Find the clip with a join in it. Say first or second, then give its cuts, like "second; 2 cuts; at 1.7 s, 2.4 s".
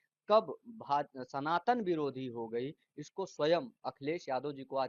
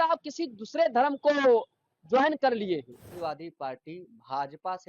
second; 1 cut; at 3.1 s